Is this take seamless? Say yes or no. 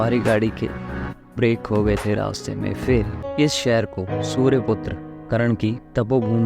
no